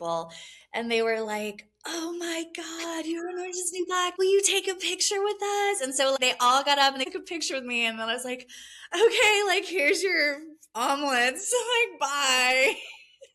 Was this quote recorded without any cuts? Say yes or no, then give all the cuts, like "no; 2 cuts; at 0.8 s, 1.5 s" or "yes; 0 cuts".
yes; 0 cuts